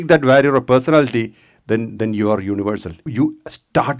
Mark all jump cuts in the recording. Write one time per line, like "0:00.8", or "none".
0:03.1

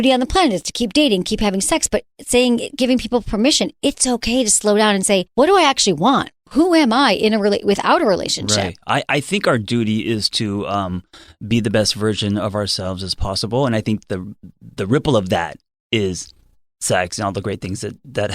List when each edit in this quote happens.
0:05.3
0:06.4

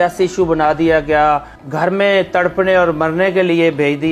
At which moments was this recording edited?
0:01.6

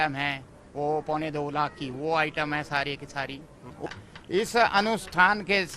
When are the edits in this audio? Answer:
0:03.9

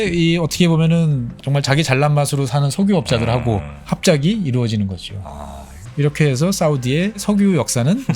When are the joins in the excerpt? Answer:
0:01.4
0:03.7
0:07.2

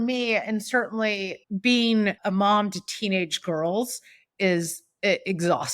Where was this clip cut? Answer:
0:01.4
0:02.2

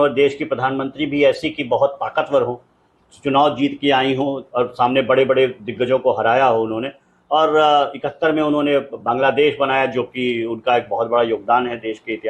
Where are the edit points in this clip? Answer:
none

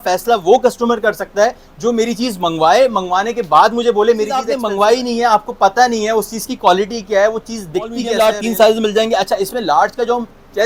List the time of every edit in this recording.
0:04.6
0:08.0

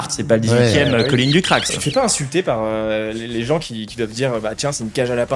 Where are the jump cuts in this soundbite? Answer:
0:01.7

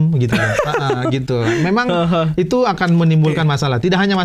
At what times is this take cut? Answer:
none

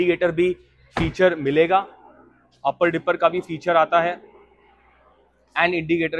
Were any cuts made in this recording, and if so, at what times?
none

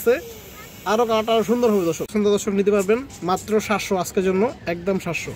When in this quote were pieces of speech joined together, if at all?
0:02.1

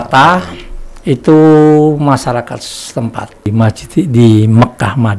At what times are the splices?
0:03.5

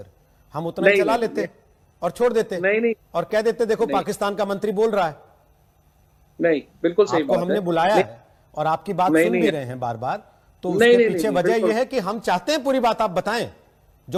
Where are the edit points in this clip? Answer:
none

